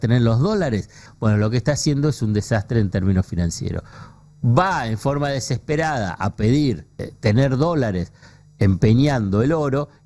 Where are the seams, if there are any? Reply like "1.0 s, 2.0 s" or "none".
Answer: 1.1 s, 7.1 s